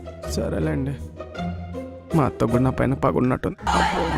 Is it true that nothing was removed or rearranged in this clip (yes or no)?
yes